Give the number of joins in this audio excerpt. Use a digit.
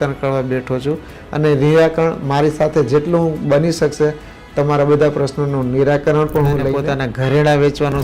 1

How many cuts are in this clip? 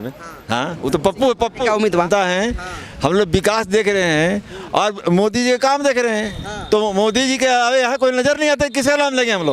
1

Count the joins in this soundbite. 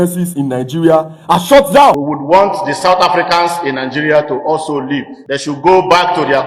2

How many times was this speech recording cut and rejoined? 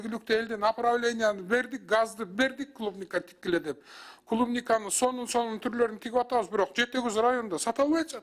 0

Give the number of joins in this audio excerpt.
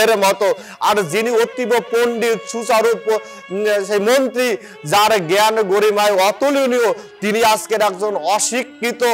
0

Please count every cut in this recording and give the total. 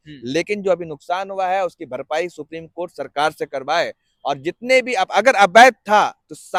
0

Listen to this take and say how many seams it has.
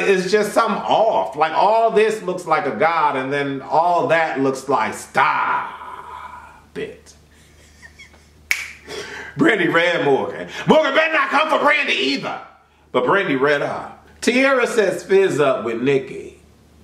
2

